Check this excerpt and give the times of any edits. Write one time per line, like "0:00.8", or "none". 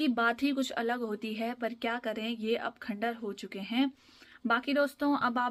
none